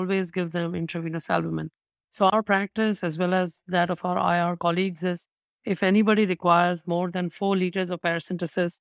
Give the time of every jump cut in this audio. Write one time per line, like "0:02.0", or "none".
none